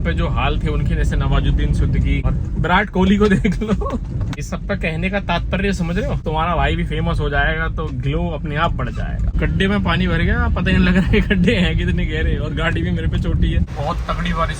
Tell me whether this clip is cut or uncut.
cut